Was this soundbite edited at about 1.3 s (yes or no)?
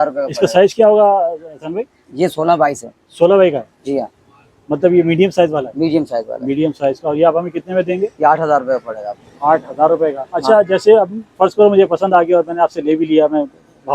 no